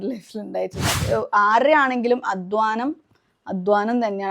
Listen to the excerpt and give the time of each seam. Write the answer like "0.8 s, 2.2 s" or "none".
1.1 s